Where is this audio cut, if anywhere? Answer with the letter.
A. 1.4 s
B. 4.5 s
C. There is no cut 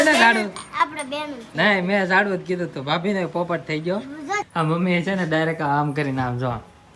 B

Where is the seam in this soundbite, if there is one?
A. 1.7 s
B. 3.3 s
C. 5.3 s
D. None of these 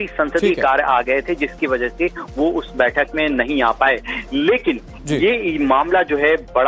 B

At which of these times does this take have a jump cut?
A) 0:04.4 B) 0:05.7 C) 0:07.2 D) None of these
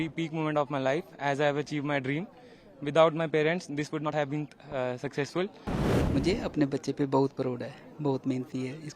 B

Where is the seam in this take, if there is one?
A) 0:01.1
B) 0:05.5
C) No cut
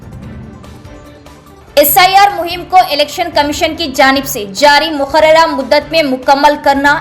A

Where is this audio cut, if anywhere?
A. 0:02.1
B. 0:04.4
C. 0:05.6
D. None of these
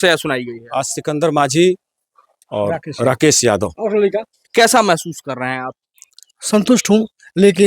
B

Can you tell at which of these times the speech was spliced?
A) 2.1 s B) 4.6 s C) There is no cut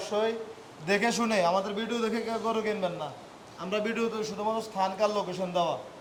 C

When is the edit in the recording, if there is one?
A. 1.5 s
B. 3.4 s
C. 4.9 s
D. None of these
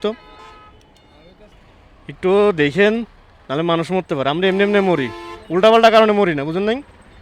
A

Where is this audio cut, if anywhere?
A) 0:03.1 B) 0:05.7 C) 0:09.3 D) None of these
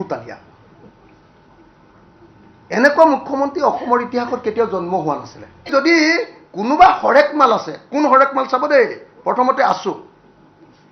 B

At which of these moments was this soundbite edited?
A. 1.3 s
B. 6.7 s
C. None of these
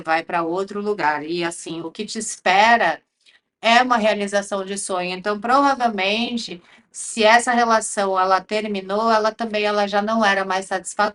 C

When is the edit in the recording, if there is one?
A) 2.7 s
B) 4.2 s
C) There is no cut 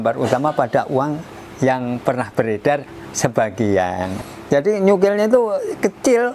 B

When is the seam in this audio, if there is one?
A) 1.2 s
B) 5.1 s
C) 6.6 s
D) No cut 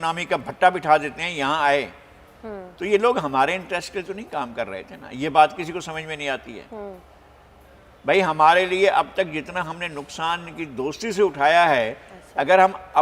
D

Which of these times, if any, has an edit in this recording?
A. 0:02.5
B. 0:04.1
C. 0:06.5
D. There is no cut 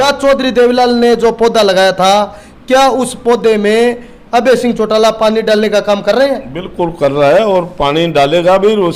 D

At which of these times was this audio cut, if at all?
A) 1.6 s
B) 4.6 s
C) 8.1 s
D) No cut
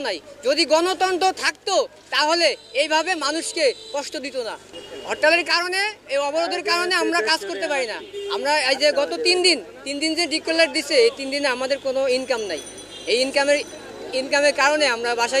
B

